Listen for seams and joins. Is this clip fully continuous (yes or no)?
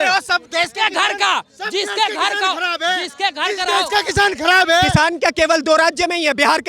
no